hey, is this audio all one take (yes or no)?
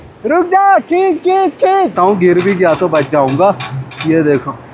no